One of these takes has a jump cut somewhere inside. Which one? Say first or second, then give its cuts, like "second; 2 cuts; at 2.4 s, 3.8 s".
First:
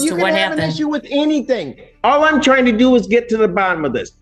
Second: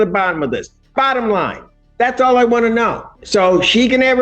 second; 1 cut; at 3.1 s